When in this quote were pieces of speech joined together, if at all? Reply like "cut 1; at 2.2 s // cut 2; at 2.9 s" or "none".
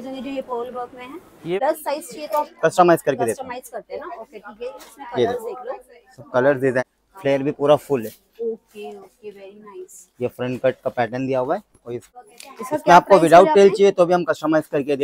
cut 1; at 1.6 s // cut 2; at 6.8 s // cut 3; at 12.0 s